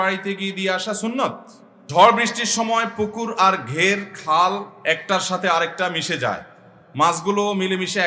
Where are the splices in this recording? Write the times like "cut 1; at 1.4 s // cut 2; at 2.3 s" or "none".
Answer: cut 1; at 1.8 s